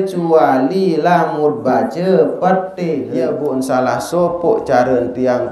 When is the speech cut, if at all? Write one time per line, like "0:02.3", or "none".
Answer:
0:03.1